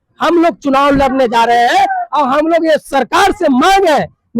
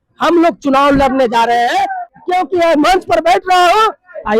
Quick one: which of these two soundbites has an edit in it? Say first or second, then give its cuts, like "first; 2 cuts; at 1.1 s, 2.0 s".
second; 1 cut; at 2.1 s